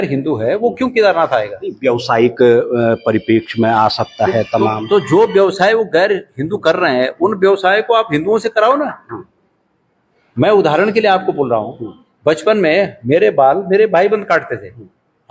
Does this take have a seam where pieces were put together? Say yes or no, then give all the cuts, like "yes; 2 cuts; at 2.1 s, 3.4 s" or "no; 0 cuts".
no; 0 cuts